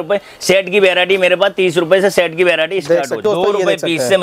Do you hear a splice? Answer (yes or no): yes